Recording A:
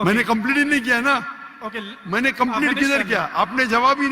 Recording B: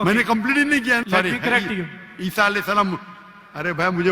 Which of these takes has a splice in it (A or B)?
B